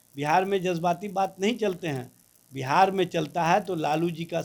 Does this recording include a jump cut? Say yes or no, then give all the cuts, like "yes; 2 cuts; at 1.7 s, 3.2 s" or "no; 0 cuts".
no; 0 cuts